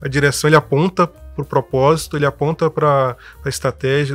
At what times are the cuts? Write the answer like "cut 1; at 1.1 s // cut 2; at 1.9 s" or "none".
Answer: none